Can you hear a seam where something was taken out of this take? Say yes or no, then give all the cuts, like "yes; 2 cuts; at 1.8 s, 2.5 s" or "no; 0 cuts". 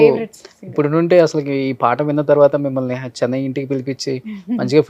no; 0 cuts